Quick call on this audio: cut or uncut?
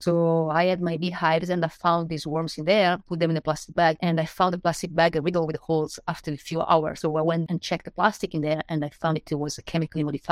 cut